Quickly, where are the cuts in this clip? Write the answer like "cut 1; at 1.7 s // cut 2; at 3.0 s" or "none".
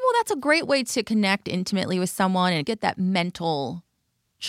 cut 1; at 2.6 s